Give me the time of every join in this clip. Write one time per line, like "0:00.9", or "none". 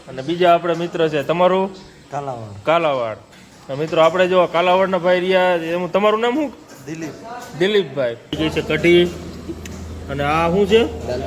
0:08.3

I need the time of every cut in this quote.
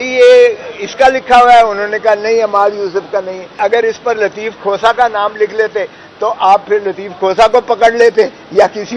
0:03.6

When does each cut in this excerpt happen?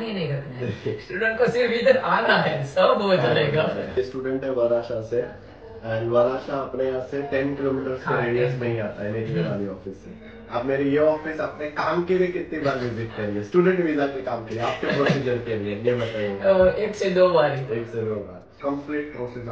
0:03.9
0:18.4

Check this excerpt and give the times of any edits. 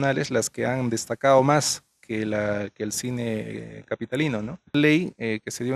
0:04.7

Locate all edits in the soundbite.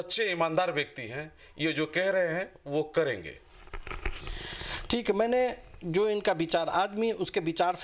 none

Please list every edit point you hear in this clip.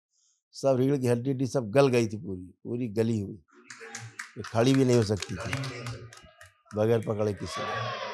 none

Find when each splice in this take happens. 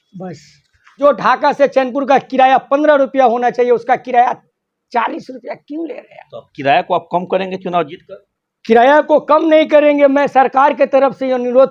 0:00.9

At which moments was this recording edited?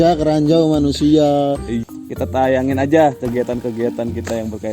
0:01.8

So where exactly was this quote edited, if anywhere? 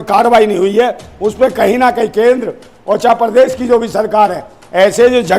none

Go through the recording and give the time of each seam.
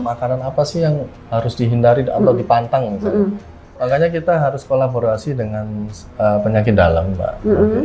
0:03.7

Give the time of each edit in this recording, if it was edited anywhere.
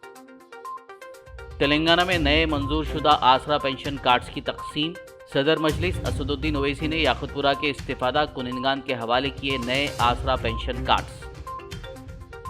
none

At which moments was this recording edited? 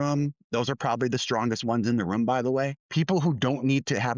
0:02.8

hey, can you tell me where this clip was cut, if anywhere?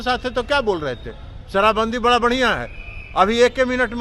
none

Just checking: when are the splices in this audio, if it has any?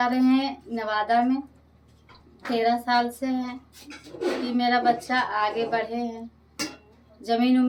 none

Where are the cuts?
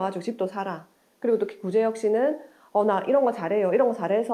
0:01.0

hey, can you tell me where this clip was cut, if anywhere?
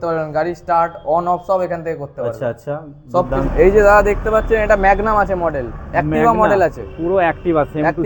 0:03.5

